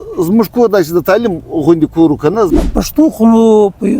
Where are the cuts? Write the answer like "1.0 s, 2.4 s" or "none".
2.3 s